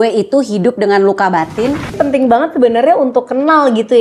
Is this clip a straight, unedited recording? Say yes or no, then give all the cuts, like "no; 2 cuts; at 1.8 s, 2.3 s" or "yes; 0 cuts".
no; 1 cut; at 1.9 s